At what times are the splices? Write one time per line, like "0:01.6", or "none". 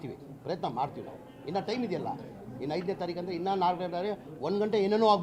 none